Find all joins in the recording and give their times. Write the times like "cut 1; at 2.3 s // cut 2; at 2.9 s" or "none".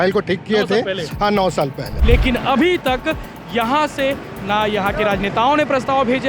cut 1; at 1.9 s

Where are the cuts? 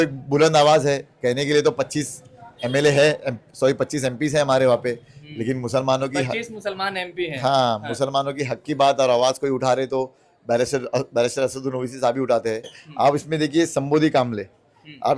cut 1; at 12.8 s

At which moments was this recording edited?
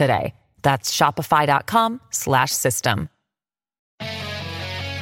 cut 1; at 3.7 s

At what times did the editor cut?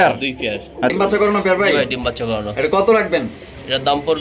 cut 1; at 0.9 s

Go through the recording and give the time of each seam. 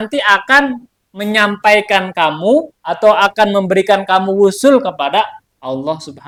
none

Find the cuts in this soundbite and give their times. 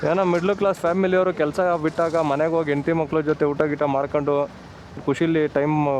cut 1; at 5.0 s

